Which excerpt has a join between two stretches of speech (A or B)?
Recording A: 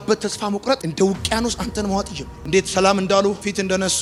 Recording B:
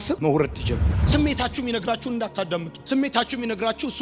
B